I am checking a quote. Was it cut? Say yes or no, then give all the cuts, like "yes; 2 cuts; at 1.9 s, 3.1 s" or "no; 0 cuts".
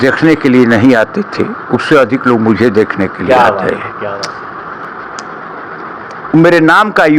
no; 0 cuts